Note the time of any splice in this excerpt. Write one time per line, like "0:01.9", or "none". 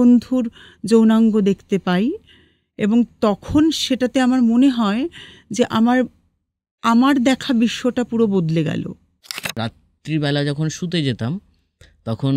0:09.5